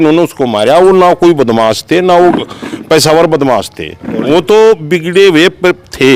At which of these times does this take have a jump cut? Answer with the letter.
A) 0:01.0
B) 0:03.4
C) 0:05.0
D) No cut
D